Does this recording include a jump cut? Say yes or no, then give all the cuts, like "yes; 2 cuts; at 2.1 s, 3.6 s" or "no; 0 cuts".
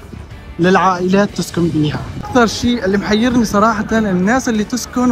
yes; 1 cut; at 2.2 s